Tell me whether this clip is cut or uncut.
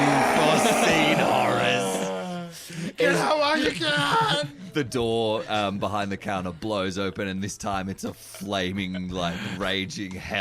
cut